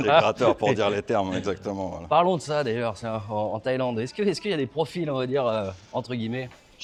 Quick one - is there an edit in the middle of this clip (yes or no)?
no